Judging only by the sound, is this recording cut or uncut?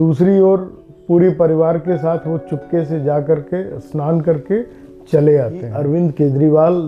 cut